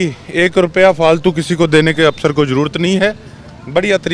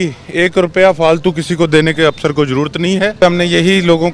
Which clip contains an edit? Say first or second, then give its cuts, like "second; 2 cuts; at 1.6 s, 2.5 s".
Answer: second; 1 cut; at 3.1 s